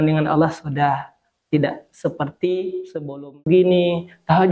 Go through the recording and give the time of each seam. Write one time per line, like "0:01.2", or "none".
0:03.5